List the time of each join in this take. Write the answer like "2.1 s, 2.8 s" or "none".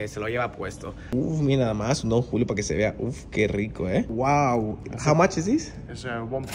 1.1 s, 4.1 s